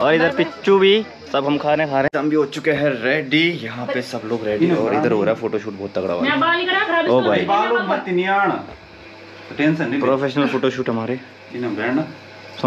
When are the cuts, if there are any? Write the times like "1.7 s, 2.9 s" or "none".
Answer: 2.1 s